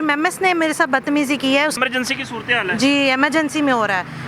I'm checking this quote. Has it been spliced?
yes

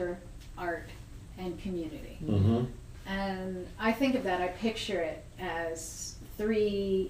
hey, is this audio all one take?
yes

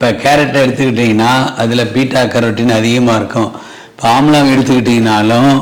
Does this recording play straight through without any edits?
yes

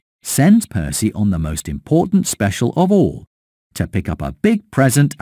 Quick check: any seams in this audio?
no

